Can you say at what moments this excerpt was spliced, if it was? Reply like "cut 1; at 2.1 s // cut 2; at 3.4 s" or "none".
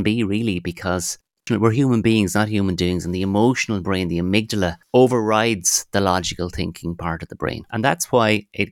cut 1; at 1.4 s // cut 2; at 4.8 s // cut 3; at 7.6 s